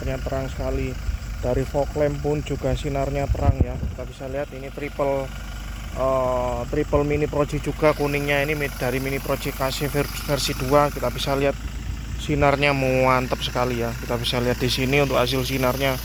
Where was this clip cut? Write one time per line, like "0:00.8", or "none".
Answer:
none